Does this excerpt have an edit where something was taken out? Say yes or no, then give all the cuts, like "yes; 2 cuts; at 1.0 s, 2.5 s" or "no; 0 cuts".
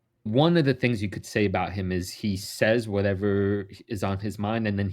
no; 0 cuts